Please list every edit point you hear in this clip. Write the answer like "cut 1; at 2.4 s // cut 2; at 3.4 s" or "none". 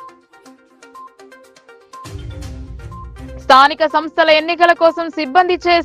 cut 1; at 1.5 s // cut 2; at 3.1 s